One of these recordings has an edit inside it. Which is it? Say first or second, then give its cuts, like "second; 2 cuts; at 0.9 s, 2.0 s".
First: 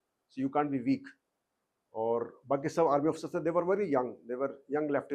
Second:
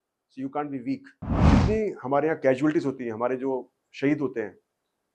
second; 1 cut; at 1.5 s